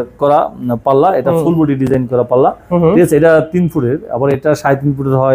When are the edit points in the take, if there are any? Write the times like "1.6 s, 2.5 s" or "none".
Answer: none